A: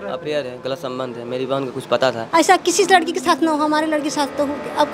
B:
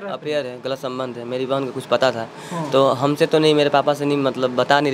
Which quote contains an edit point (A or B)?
A